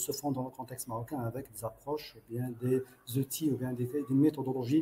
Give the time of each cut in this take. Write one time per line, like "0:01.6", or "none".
none